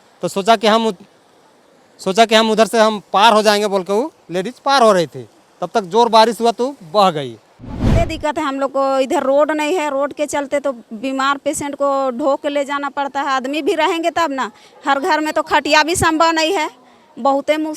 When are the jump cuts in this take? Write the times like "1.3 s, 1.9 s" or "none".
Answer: 8.0 s